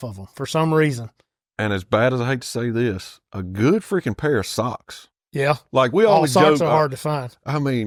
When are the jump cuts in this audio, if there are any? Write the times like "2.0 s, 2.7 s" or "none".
none